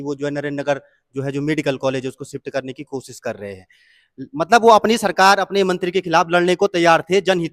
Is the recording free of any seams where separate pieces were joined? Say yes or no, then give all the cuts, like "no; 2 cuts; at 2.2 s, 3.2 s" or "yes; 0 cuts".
yes; 0 cuts